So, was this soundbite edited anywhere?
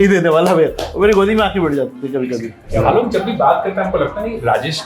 yes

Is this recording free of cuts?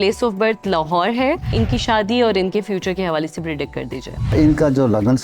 no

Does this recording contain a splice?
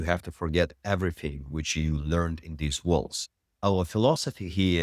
yes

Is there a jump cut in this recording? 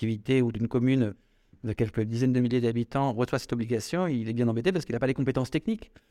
no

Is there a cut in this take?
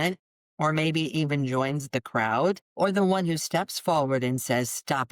yes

